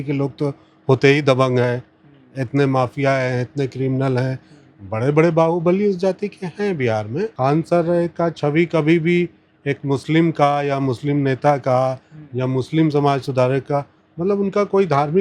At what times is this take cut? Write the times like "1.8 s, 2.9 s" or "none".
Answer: 7.3 s